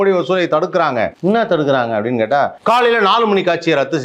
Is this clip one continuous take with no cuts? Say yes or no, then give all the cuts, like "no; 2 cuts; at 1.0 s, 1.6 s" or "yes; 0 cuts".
no; 2 cuts; at 1.1 s, 2.6 s